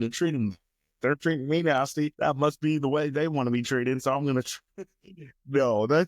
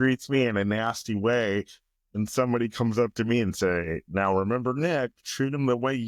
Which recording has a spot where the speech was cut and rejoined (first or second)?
first